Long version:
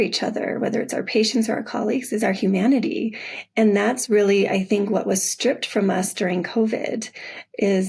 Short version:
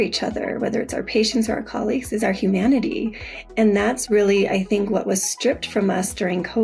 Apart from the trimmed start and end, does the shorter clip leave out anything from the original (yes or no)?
no